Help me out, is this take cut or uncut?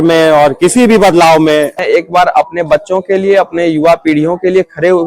cut